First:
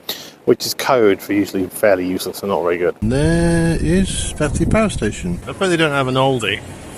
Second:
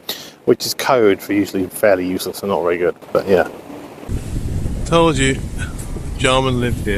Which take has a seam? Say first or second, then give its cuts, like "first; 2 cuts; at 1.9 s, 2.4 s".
first; 2 cuts; at 3.0 s, 5.5 s